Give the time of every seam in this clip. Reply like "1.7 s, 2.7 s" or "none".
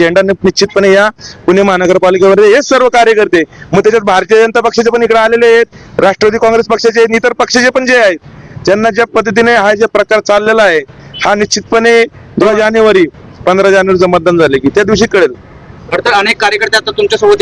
none